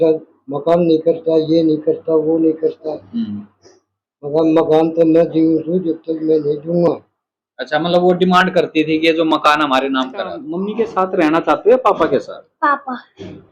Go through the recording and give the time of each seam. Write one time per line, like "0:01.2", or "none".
0:10.7